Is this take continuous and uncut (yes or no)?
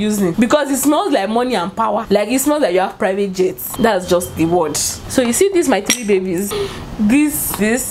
yes